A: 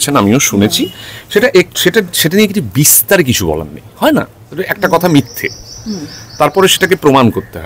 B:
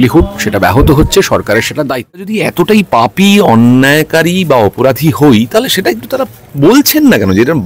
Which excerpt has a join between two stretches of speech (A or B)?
B